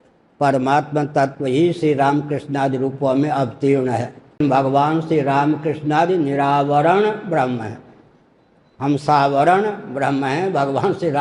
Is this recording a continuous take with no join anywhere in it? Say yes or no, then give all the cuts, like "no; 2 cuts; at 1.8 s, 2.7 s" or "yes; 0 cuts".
no; 1 cut; at 4.4 s